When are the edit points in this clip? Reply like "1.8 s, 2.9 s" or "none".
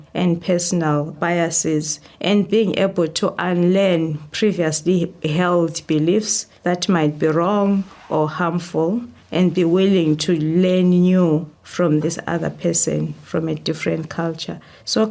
none